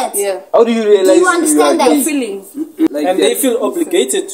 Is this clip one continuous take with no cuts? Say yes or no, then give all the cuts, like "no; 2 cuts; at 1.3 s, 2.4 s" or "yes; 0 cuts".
no; 1 cut; at 2.9 s